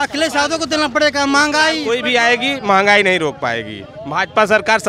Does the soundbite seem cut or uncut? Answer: cut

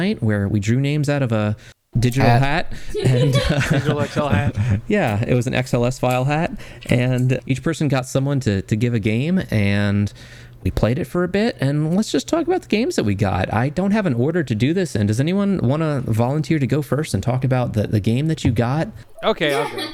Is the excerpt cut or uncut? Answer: uncut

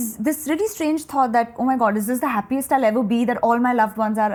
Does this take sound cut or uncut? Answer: uncut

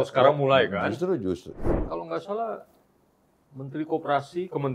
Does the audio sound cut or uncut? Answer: cut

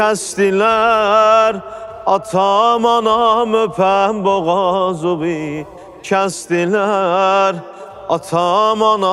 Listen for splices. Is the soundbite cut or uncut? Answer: uncut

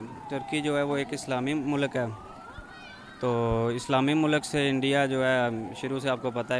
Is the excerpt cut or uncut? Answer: uncut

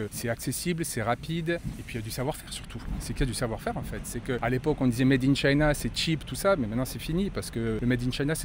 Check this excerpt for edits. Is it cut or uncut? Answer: uncut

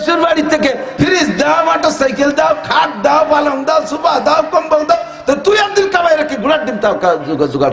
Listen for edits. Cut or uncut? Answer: uncut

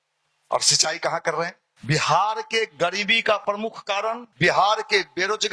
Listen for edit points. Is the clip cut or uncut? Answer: cut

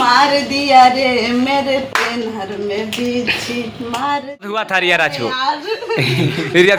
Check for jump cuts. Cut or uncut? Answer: cut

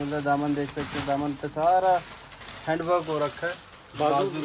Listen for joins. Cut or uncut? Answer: uncut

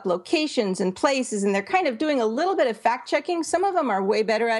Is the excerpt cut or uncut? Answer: uncut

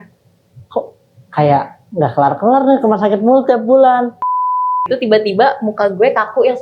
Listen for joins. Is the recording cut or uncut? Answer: cut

